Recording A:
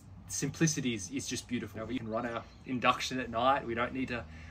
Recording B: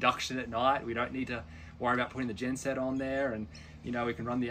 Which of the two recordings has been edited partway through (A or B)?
A